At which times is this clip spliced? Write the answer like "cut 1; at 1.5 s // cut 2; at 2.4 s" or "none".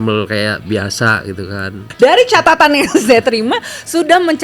cut 1; at 1.8 s